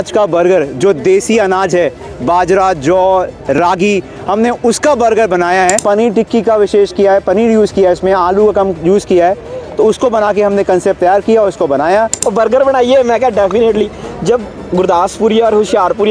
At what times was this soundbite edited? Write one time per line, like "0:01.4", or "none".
0:05.8
0:12.2